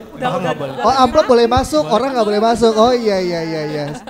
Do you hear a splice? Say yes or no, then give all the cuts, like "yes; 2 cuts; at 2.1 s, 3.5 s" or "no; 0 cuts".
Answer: no; 0 cuts